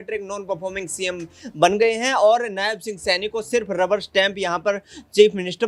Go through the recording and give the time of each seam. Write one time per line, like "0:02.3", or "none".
none

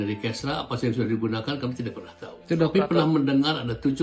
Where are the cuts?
none

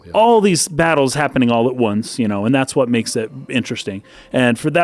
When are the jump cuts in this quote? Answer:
none

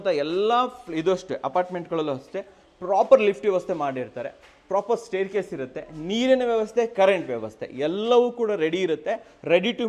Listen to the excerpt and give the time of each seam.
none

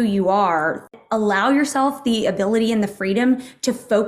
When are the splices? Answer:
0:01.0

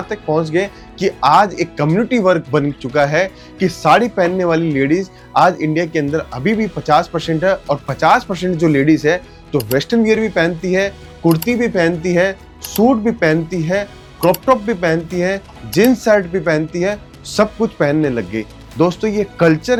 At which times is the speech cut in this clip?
none

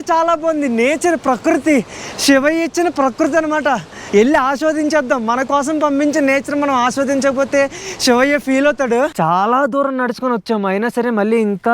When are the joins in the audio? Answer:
0:03.9
0:09.1

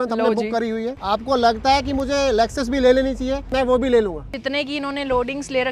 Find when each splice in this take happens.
0:01.0
0:03.5
0:04.3

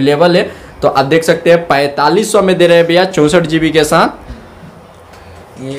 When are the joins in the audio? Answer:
none

